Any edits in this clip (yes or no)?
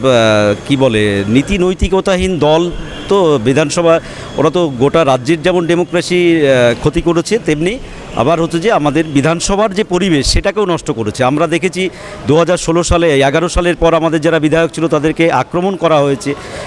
no